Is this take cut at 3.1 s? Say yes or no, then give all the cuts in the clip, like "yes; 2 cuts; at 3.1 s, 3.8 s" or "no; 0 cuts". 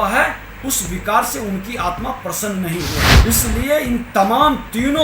yes; 1 cut; at 3.1 s